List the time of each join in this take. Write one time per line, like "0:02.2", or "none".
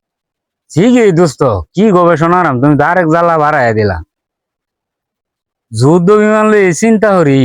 none